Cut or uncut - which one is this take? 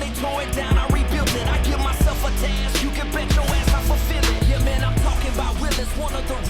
uncut